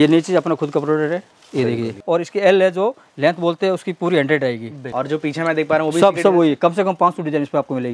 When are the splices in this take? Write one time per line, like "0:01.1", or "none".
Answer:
0:02.0
0:04.8